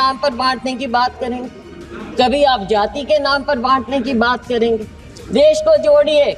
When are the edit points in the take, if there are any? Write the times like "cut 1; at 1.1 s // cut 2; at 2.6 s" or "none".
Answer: none